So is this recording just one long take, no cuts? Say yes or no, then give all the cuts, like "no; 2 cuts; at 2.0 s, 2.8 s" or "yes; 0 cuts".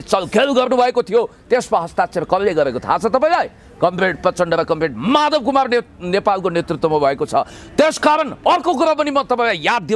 yes; 0 cuts